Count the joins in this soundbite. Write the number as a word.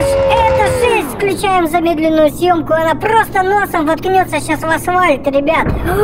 zero